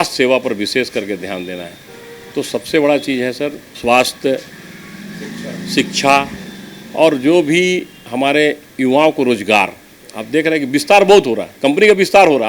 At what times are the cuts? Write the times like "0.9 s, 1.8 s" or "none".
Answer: none